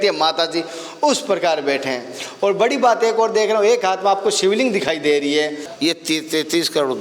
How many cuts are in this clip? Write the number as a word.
one